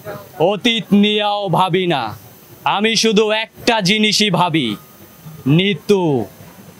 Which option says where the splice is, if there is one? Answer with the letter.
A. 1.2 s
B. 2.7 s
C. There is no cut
C